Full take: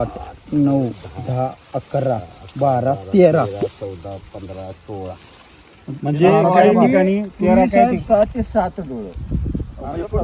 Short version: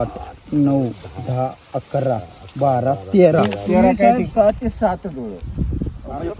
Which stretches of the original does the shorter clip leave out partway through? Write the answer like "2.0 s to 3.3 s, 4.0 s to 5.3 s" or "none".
3.5 s to 7.3 s